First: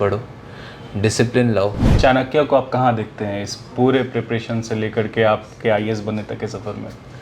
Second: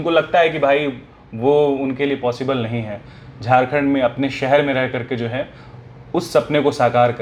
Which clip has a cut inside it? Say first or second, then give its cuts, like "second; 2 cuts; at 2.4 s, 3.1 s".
first; 1 cut; at 1.9 s